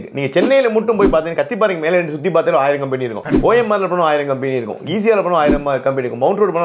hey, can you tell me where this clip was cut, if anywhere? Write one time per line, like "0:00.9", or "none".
none